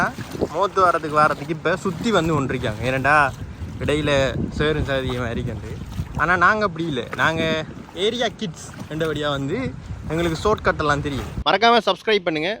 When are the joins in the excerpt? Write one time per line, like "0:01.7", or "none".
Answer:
0:11.3